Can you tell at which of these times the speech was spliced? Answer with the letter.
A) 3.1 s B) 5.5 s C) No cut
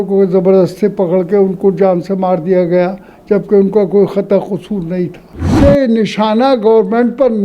B